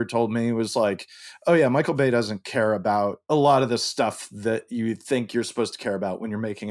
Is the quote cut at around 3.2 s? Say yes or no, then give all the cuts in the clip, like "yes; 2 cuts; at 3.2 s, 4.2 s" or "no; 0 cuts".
yes; 1 cut; at 3.2 s